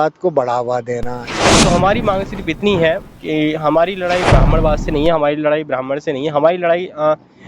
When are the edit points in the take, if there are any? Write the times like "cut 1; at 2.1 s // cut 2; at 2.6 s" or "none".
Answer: cut 1; at 1.4 s